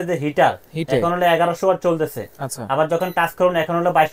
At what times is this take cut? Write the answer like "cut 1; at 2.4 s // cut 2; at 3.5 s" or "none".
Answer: none